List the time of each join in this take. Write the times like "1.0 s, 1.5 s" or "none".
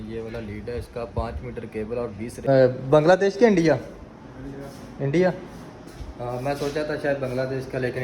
2.5 s